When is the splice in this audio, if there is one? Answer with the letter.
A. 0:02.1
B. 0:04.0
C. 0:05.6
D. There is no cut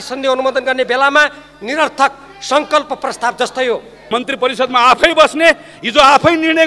B